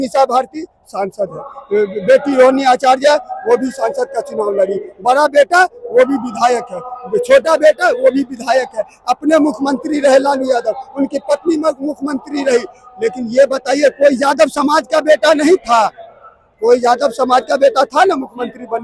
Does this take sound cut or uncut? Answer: uncut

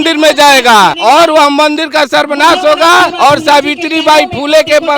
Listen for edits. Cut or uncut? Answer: cut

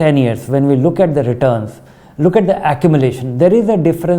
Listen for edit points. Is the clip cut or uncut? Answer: uncut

